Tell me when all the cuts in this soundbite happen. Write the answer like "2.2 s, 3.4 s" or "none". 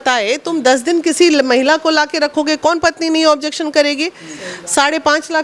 none